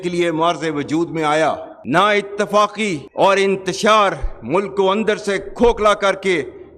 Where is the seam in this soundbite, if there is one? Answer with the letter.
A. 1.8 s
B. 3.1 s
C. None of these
A